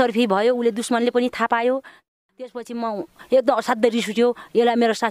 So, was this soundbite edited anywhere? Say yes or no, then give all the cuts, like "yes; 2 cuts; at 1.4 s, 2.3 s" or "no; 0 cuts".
yes; 1 cut; at 2.1 s